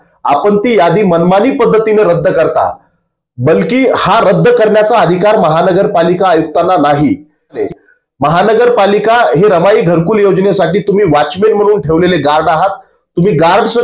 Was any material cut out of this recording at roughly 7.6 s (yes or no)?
yes